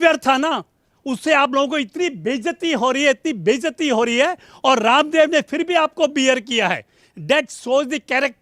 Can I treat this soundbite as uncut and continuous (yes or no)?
yes